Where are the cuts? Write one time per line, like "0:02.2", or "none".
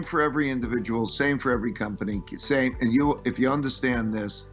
none